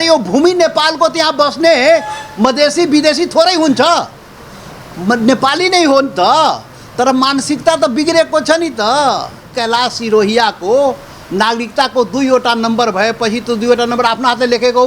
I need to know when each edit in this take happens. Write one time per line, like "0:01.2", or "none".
0:09.5